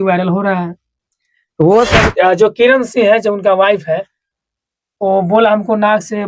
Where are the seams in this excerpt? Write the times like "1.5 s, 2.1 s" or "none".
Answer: 2.1 s